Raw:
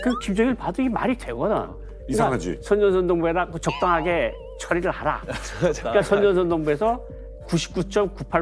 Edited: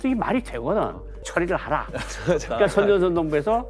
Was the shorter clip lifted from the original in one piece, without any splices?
no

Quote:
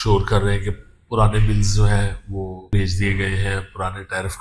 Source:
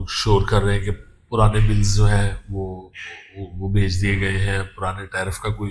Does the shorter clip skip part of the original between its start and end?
yes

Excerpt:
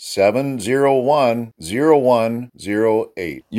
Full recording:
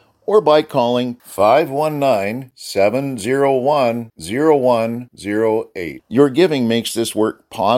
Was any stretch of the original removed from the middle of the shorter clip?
no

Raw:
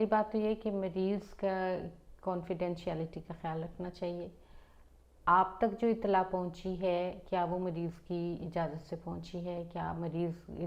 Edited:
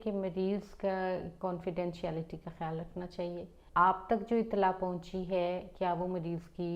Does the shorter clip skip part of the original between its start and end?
yes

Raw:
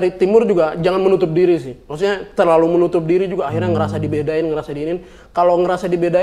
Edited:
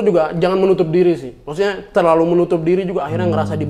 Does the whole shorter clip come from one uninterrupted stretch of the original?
yes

